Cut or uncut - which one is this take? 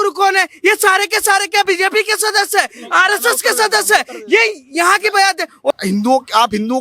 cut